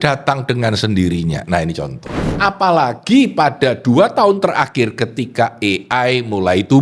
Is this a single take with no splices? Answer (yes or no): no